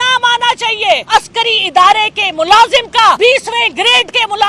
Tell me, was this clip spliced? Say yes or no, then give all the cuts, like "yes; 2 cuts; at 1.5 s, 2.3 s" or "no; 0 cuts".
yes; 2 cuts; at 1.0 s, 3.2 s